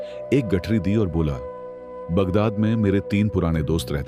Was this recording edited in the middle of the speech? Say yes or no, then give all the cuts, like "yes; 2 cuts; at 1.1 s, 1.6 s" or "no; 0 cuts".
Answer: no; 0 cuts